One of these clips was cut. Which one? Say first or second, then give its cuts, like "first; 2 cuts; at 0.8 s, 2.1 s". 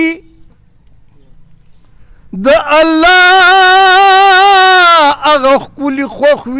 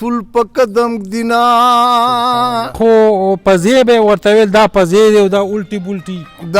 second; 1 cut; at 2.8 s